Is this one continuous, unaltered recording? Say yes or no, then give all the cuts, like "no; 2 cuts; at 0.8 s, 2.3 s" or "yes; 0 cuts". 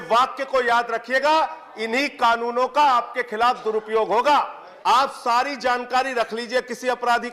no; 1 cut; at 4.6 s